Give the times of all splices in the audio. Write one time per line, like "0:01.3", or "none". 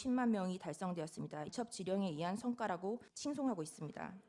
0:01.5
0:03.1